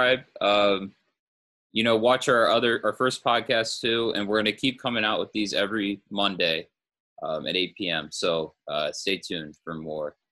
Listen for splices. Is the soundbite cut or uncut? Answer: uncut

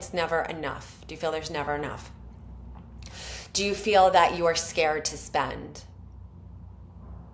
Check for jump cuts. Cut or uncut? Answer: uncut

